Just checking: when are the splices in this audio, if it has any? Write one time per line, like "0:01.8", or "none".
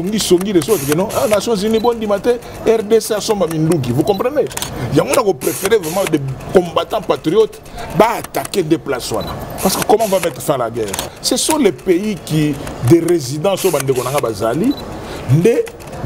0:09.5
0:11.1